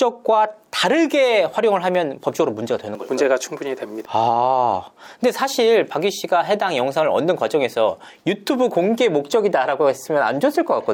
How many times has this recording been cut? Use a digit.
0